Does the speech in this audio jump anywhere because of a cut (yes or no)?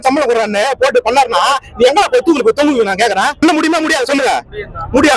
yes